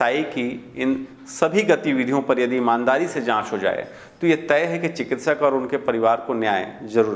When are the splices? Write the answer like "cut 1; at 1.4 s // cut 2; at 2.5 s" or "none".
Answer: none